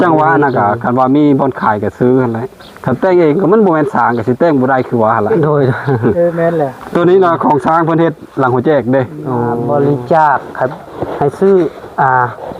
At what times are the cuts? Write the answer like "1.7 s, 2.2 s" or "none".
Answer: 9.6 s